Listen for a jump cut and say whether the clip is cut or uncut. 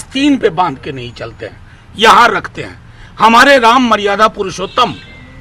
uncut